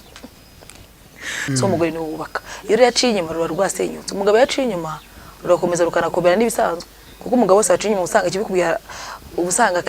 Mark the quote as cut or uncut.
cut